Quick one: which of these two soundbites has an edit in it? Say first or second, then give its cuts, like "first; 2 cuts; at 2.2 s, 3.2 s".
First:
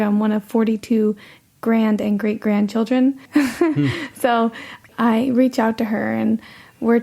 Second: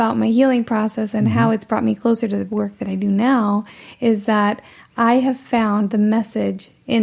first; 2 cuts; at 3.2 s, 4.8 s